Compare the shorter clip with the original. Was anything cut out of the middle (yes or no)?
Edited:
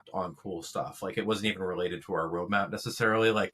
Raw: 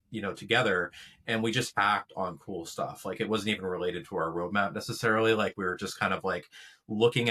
no